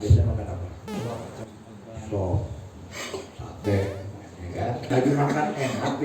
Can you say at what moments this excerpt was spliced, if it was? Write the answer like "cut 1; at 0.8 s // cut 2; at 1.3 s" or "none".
cut 1; at 0.9 s // cut 2; at 3.1 s // cut 3; at 4.9 s